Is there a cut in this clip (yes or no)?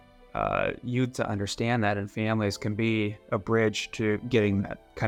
no